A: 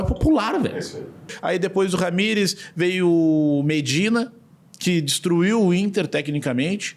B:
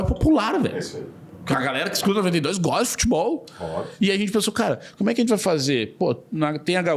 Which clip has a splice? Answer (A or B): A